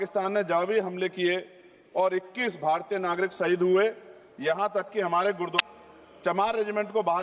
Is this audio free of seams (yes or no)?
no